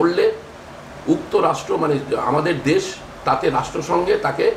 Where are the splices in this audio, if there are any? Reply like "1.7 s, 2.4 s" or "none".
none